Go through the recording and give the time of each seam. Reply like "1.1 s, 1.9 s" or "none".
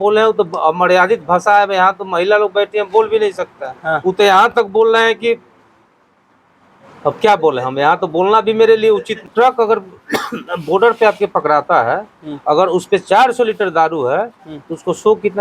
9.3 s